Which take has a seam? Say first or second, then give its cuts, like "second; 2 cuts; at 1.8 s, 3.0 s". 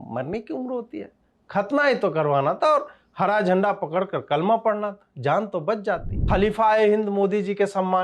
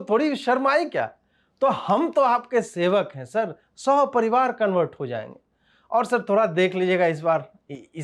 first; 1 cut; at 6.1 s